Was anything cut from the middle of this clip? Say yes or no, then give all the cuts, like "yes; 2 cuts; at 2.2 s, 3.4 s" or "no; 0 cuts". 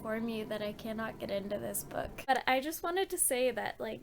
yes; 1 cut; at 2.3 s